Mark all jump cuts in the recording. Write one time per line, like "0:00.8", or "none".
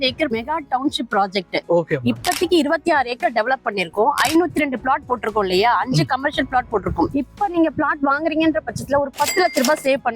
0:07.1